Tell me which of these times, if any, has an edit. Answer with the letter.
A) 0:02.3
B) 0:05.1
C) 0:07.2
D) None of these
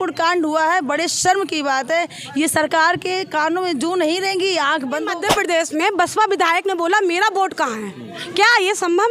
B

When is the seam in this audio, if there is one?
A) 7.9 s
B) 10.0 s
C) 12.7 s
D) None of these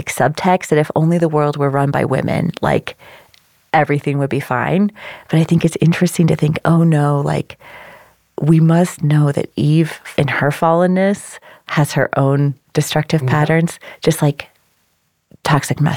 B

